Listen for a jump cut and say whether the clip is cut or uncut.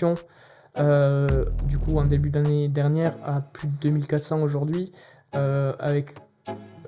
uncut